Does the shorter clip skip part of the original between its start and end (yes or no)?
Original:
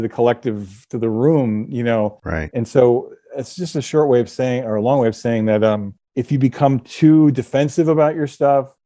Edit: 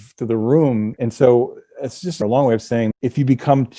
yes